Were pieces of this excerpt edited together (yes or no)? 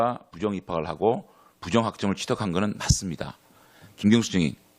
yes